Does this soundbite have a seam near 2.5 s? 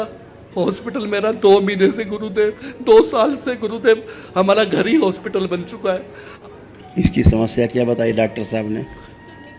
no; 1 cut; at 6.2 s

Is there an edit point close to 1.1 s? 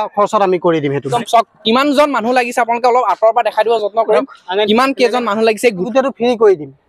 yes; 2 cuts; at 1.1 s, 5.9 s

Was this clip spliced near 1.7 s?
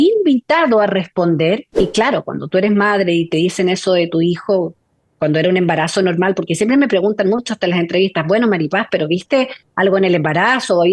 yes; 1 cut; at 1.7 s

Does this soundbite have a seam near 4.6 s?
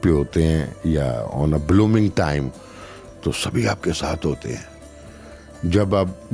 no; 0 cuts

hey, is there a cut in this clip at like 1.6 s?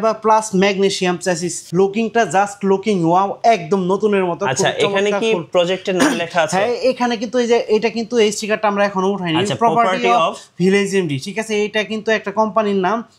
yes; 1 cut; at 1.6 s

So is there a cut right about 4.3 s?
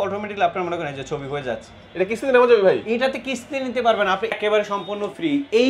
yes; 1 cut; at 4.3 s

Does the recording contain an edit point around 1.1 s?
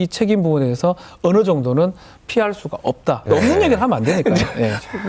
no; 1 cut; at 3.2 s

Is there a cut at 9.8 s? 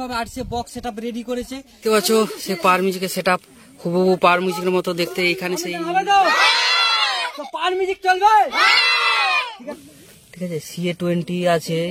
yes; 3 cuts; at 1.7 s, 5.6 s, 9.8 s

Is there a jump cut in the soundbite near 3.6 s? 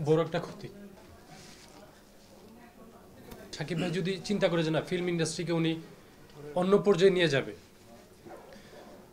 yes; 2 cuts; at 1.0 s, 3.6 s

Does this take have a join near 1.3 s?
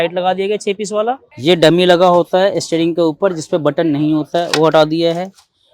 yes; 1 cut; at 1.3 s

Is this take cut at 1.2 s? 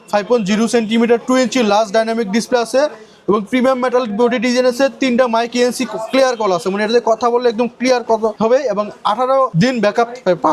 no; 2 cuts; at 8.4 s, 9.5 s

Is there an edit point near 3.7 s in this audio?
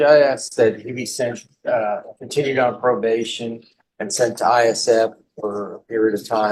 no; 0 cuts

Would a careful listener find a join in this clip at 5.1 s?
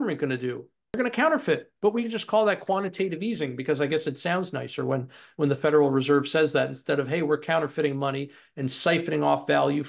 no; 1 cut; at 1.0 s

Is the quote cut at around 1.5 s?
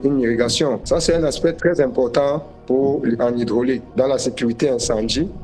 no; 1 cut; at 3.9 s

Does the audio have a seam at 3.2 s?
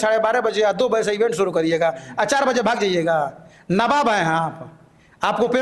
no; 0 cuts

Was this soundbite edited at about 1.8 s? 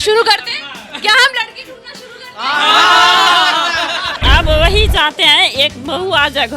no; 1 cut; at 4.2 s

